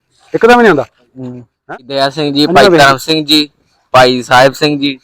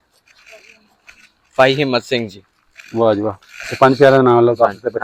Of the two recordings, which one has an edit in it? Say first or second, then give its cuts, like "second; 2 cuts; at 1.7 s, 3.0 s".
first; 1 cut; at 1.7 s